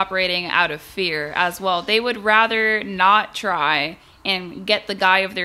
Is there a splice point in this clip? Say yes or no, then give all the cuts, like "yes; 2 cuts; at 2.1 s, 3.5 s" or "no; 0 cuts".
no; 0 cuts